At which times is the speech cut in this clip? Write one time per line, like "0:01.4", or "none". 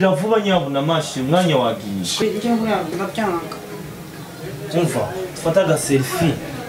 0:02.1